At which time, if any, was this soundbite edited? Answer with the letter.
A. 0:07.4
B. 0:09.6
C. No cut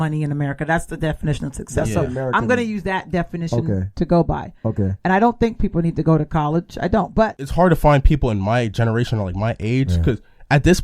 A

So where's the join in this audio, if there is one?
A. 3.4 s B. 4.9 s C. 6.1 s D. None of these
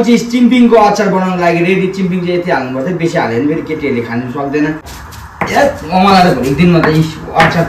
B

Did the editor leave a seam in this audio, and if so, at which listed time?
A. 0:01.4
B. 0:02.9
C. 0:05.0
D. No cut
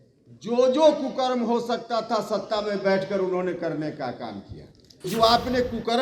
C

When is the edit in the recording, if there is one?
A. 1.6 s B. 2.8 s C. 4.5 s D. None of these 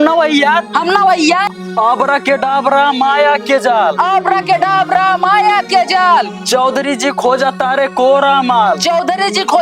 A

